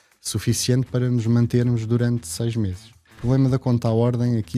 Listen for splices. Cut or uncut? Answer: cut